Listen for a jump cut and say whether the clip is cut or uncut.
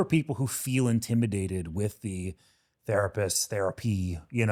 uncut